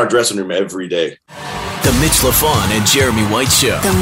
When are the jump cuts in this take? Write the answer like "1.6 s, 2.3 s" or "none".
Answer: 1.3 s

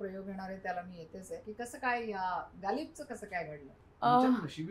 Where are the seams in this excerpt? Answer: 1.4 s

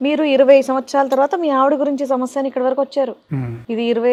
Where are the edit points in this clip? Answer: none

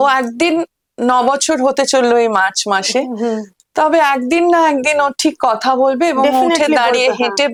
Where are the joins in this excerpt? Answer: none

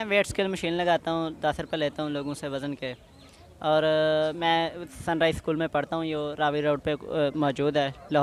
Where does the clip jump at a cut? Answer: none

